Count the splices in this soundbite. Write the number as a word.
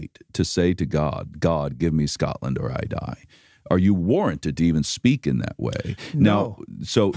zero